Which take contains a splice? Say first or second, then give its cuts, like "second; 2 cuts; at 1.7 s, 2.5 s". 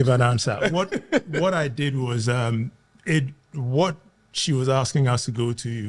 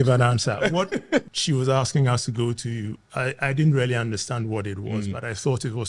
second; 1 cut; at 1.3 s